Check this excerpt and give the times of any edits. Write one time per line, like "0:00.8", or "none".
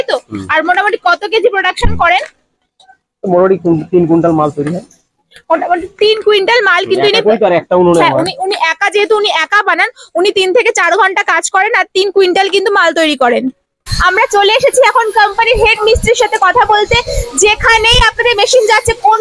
0:14.0